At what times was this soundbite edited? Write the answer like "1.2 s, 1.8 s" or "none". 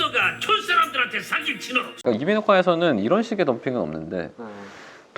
2.0 s